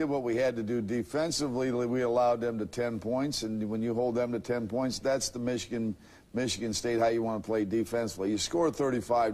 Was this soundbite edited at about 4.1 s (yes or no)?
yes